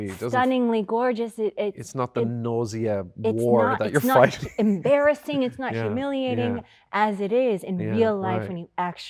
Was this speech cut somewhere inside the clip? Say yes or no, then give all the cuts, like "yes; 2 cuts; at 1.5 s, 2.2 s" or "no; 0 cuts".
no; 0 cuts